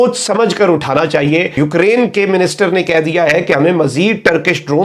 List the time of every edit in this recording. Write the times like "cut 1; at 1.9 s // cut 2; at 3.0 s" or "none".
cut 1; at 1.5 s